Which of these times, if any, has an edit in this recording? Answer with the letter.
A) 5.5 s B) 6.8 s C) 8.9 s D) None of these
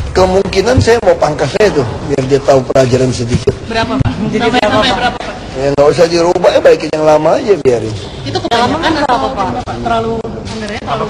A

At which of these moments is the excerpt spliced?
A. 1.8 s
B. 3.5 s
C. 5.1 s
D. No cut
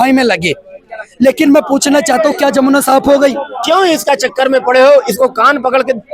B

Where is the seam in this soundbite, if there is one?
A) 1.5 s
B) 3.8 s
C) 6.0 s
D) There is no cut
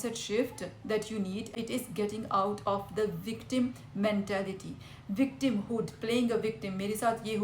A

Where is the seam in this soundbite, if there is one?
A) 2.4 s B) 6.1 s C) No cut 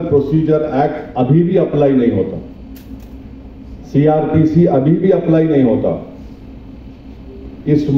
C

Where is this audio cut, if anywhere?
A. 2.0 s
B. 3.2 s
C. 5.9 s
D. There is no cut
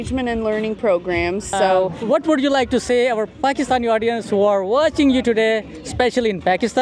A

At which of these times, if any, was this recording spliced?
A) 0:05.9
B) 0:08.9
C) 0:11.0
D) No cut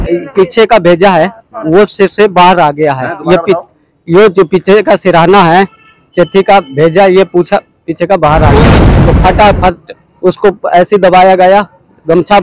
B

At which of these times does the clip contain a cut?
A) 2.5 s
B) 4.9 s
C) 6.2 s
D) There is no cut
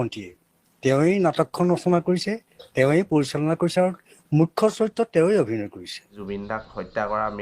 C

